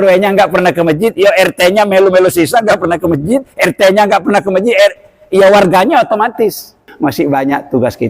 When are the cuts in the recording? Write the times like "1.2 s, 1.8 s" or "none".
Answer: 6.8 s